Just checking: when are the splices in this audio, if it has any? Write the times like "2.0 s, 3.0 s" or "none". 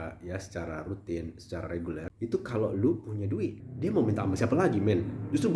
3.6 s